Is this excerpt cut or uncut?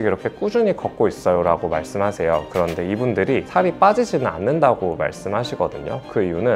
cut